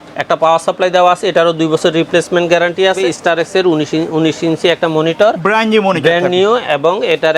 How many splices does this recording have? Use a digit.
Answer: 1